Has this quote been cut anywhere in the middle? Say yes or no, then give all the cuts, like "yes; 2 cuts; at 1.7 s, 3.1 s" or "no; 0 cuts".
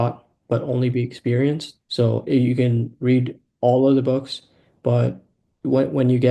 yes; 1 cut; at 1.8 s